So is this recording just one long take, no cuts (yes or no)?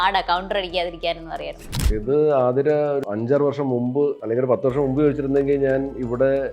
no